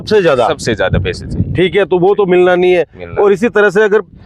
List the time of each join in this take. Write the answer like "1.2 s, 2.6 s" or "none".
none

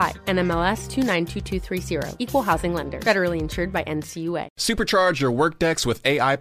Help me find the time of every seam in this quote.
4.5 s

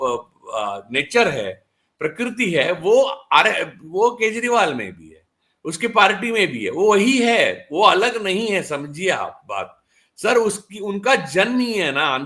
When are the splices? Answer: none

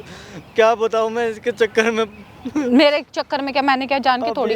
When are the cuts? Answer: none

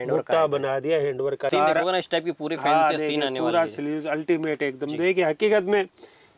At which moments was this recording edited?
1.5 s

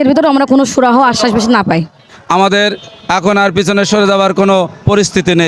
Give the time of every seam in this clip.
2.1 s

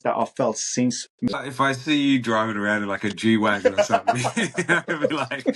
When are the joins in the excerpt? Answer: 1.3 s

